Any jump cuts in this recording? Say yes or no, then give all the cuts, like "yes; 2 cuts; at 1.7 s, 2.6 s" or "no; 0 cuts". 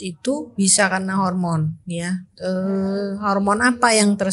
no; 0 cuts